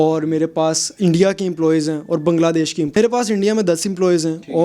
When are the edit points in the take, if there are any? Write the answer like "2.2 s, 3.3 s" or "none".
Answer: 3.0 s